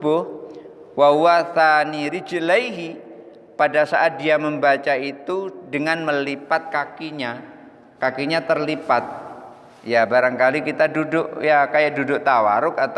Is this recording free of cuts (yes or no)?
yes